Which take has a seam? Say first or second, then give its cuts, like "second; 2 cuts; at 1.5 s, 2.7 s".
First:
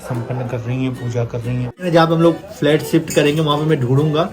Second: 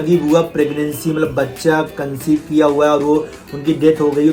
first; 1 cut; at 1.8 s